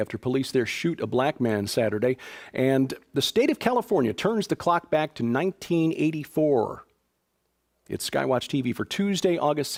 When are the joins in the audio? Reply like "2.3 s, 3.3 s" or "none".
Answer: none